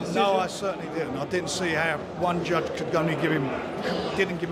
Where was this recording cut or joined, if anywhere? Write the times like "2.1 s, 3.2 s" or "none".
none